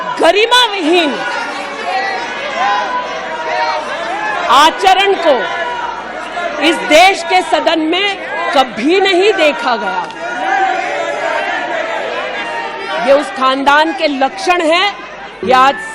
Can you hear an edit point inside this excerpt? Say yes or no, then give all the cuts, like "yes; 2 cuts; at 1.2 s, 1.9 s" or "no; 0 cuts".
no; 0 cuts